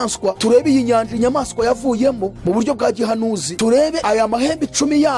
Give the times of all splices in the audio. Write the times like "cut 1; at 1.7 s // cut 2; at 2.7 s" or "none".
cut 1; at 2.3 s